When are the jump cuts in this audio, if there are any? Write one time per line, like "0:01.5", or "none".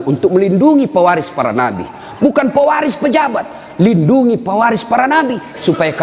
none

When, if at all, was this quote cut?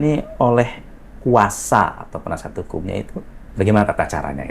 0:03.4

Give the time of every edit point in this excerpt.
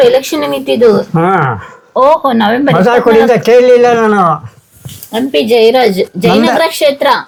none

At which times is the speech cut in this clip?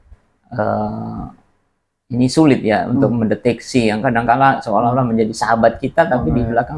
none

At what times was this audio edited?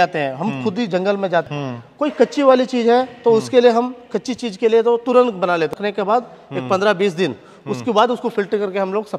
0:01.5
0:05.7

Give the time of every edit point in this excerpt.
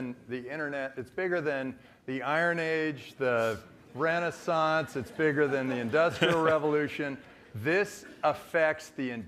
none

